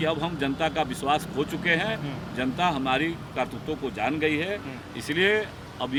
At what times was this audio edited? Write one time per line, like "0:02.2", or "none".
none